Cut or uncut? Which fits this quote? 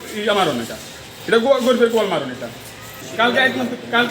uncut